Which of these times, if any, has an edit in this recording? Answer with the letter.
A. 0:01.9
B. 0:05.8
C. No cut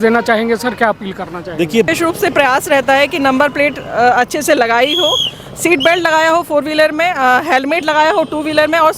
A